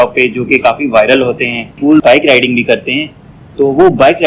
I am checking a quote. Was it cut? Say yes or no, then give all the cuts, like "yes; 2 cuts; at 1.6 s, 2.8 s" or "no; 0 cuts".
yes; 1 cut; at 1.7 s